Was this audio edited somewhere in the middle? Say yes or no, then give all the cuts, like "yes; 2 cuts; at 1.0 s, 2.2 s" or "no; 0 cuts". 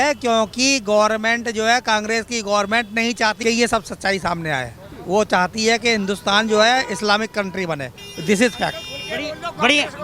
no; 0 cuts